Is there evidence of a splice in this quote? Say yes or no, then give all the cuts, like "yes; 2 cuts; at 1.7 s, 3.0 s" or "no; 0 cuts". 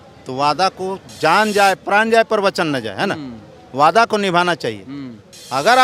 no; 0 cuts